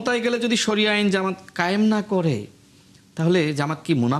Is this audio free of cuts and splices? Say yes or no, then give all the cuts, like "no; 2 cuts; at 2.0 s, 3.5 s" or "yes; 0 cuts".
yes; 0 cuts